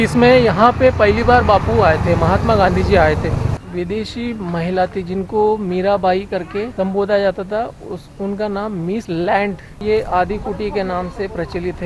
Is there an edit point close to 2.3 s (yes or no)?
no